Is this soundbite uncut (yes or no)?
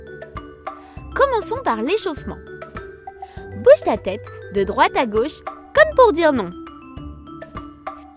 no